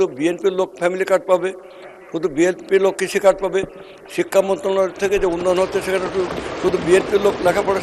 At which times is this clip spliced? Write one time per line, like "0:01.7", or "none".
none